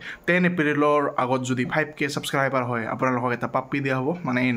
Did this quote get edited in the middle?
no; 0 cuts

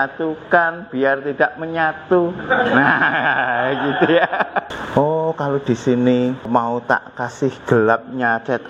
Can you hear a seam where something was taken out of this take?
yes; 2 cuts; at 4.7 s, 6.5 s

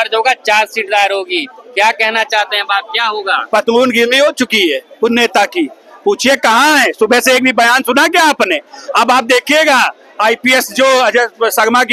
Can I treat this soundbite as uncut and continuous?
yes; 0 cuts

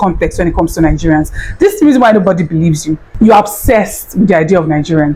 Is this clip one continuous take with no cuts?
yes; 0 cuts

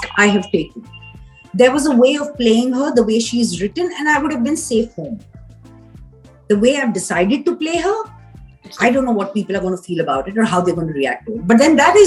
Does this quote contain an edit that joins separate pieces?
no; 0 cuts

